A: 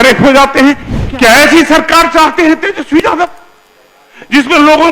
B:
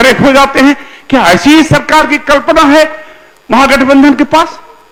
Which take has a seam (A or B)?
A